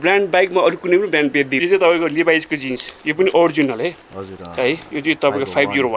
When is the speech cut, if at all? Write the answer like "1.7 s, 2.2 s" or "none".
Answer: 1.6 s